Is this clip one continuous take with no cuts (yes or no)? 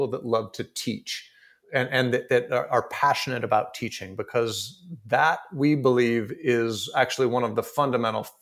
no